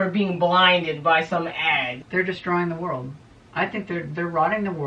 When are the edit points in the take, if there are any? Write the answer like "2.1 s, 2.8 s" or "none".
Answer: 2.0 s